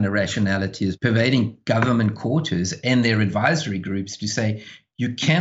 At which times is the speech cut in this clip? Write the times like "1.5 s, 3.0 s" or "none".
1.0 s